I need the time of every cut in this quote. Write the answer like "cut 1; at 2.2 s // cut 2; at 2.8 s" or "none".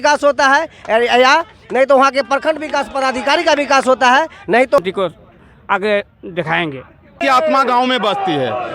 cut 1; at 4.8 s // cut 2; at 7.2 s